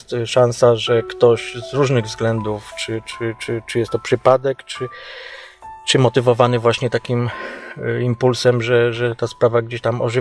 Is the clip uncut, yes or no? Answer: yes